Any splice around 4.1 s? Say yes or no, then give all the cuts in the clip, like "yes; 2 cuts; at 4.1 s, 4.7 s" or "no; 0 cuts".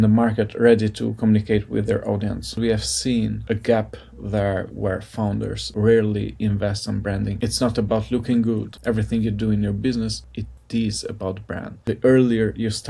no; 4 cuts; at 2.6 s, 7.3 s, 8.7 s, 11.7 s